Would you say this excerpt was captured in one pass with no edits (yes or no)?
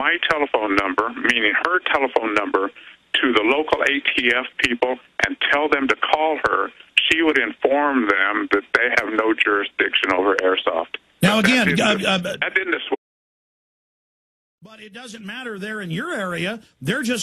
yes